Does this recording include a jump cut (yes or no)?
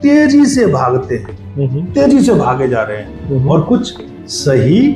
no